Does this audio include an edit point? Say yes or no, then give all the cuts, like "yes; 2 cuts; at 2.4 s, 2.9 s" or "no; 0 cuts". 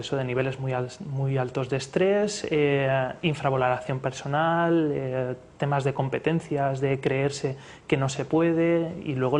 yes; 1 cut; at 5.0 s